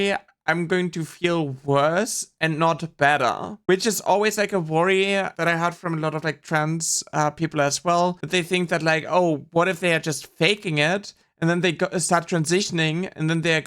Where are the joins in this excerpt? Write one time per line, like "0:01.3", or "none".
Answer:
0:05.3
0:08.2